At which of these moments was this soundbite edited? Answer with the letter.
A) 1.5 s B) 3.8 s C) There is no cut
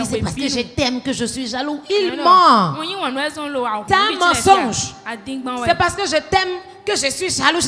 B